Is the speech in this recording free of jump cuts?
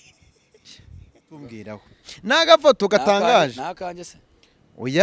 no; 1 cut; at 1.4 s

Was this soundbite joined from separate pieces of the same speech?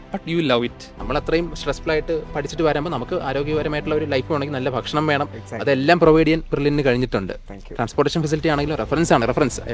yes; 1 cut; at 1.0 s

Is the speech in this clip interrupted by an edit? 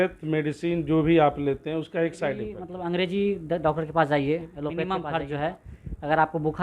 yes; 2 cuts; at 2.7 s, 4.7 s

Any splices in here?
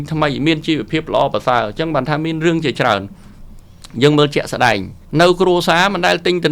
yes; 1 cut; at 4.9 s

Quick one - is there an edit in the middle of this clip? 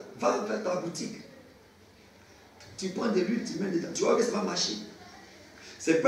no; 0 cuts

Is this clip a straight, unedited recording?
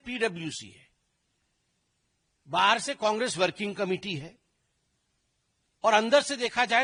yes; 0 cuts

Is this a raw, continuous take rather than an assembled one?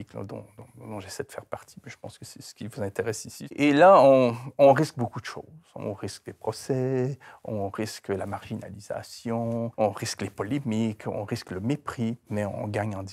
no; 3 cuts; at 3.4 s, 9.7 s, 12.2 s

